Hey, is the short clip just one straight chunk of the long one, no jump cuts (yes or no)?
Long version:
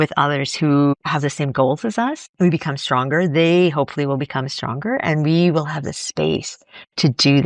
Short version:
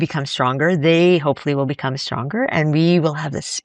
yes